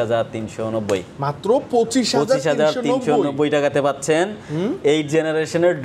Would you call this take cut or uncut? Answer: uncut